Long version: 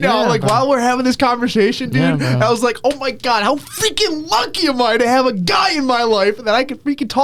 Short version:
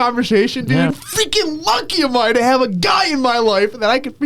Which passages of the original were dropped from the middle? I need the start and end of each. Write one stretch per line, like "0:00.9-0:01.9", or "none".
0:02.2-0:03.6